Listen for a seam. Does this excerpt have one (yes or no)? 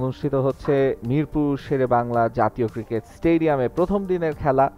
no